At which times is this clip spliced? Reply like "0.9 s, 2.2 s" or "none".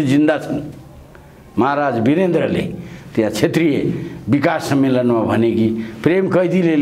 none